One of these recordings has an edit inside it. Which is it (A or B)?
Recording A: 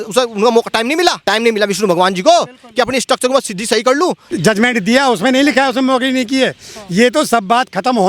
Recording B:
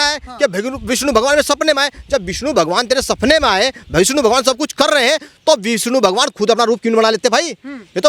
A